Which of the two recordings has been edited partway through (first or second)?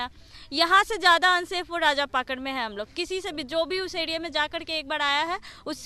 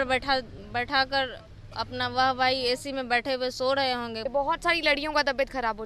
second